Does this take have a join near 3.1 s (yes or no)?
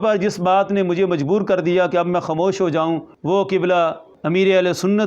yes